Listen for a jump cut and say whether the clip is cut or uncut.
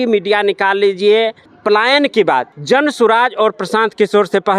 cut